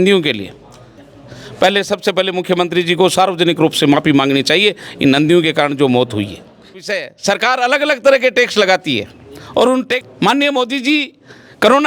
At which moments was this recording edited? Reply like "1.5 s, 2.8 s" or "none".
1.0 s, 6.7 s, 10.1 s